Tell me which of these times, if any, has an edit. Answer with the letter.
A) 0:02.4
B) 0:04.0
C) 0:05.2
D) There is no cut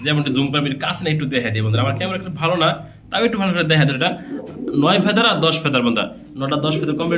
B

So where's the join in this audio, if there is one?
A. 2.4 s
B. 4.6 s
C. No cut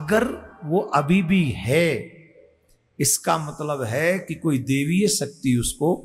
C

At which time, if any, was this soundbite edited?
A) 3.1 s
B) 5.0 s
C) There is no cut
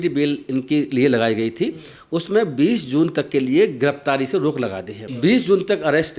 B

